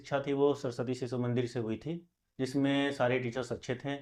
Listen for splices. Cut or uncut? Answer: uncut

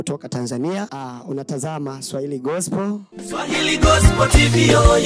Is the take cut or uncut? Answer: cut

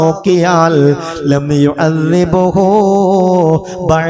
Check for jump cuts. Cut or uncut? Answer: uncut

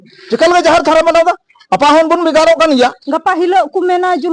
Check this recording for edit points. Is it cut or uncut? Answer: cut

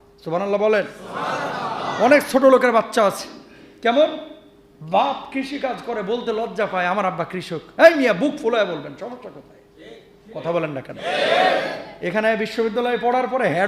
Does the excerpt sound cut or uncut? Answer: cut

